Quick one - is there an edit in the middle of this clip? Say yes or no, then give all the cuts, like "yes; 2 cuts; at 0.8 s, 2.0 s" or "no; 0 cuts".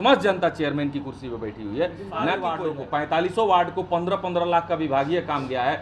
yes; 1 cut; at 2.5 s